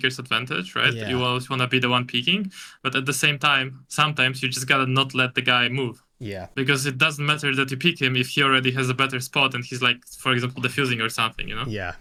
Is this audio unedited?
yes; 0 cuts

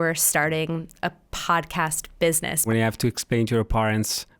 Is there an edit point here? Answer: yes; 1 cut; at 2.7 s

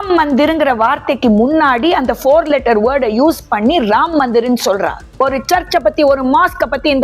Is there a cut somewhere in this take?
yes; 1 cut; at 5.1 s

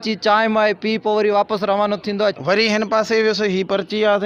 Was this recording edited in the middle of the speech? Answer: yes; 1 cut; at 2.4 s

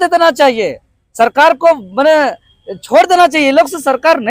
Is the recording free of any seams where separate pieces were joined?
yes; 0 cuts

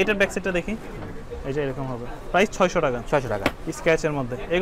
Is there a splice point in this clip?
yes; 1 cut; at 3.7 s

